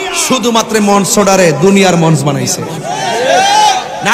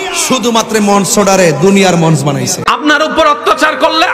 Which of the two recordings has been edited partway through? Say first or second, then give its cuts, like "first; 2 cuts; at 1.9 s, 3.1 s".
second; 1 cut; at 2.6 s